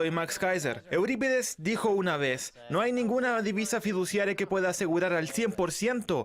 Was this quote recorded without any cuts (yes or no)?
yes